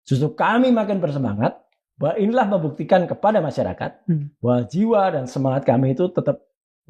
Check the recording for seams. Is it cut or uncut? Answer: uncut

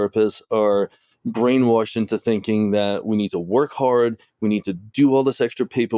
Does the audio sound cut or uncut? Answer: uncut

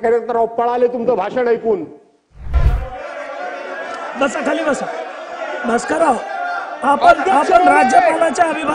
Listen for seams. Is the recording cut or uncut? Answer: cut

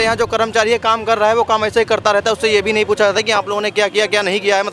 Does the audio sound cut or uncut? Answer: uncut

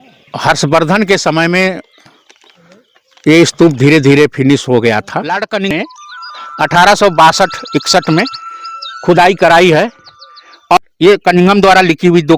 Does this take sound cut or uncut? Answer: cut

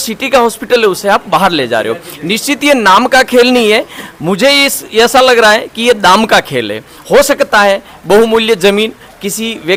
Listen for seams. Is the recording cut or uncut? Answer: uncut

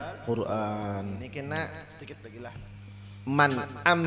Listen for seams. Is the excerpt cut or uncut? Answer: cut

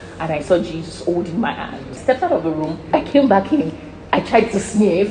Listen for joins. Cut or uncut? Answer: cut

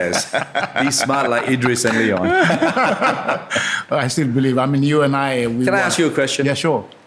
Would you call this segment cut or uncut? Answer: uncut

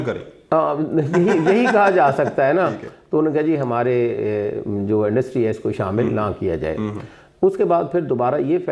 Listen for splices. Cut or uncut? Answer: uncut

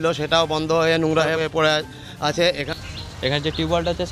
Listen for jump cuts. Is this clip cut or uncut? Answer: cut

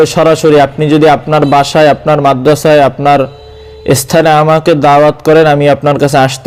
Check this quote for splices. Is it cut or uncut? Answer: uncut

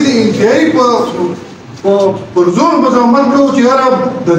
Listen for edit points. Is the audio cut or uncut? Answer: uncut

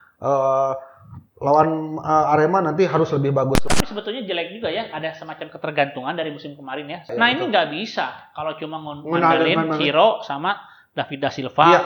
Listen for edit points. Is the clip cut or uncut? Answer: cut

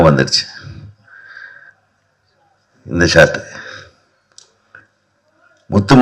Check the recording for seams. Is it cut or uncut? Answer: uncut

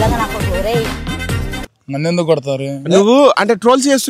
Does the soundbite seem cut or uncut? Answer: uncut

